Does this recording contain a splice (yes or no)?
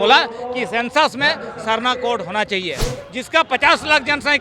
yes